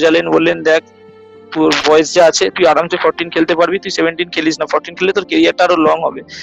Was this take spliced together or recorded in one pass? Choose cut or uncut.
uncut